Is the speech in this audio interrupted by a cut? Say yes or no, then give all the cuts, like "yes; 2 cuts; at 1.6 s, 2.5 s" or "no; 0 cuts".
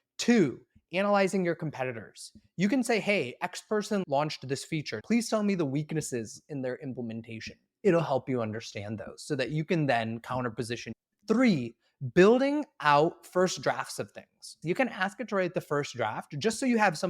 yes; 4 cuts; at 4.0 s, 5.0 s, 10.8 s, 14.6 s